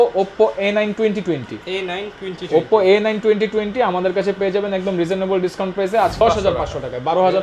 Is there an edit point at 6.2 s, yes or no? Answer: yes